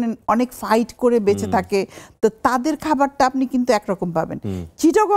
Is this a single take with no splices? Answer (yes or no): yes